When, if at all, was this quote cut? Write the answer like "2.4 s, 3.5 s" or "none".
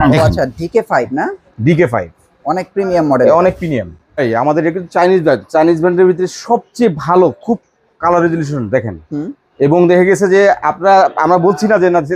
4.2 s